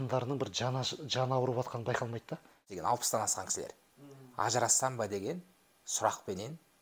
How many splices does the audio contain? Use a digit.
1